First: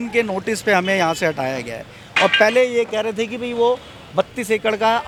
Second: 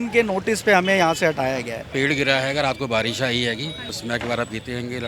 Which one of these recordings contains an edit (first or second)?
second